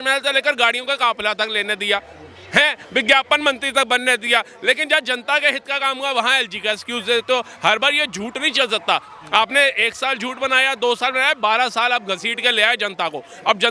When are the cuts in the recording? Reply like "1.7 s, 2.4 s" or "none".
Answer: none